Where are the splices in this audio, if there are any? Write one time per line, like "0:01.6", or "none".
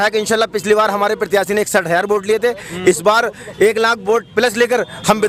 none